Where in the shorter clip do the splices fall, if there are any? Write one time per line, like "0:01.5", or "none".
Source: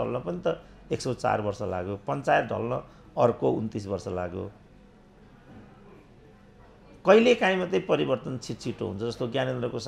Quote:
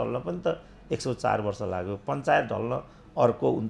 none